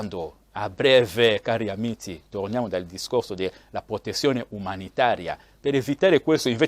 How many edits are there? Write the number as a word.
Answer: one